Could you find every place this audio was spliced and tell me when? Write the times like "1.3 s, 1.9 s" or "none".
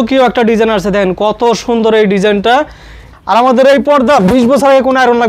3.0 s